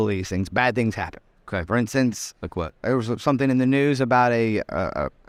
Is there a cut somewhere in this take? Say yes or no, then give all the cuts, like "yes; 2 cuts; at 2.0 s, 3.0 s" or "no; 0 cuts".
no; 0 cuts